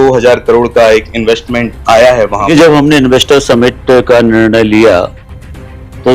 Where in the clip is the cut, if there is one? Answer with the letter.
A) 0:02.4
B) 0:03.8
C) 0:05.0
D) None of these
A